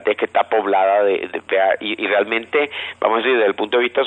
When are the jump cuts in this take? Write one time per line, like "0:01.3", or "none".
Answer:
0:02.0